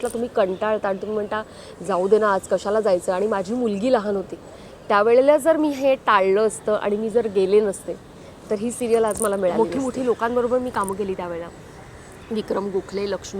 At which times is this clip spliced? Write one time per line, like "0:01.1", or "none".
0:09.5